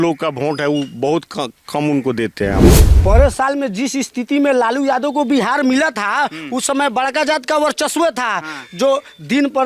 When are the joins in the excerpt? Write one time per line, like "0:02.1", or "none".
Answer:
0:02.9